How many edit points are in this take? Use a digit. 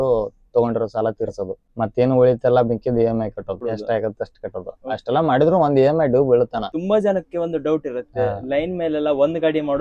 3